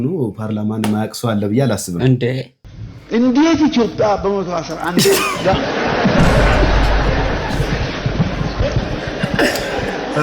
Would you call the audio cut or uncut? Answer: cut